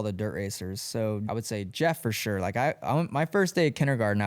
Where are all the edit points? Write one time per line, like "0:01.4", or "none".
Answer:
0:01.2